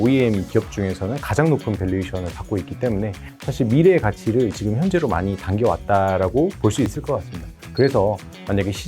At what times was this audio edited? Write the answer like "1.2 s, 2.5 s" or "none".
none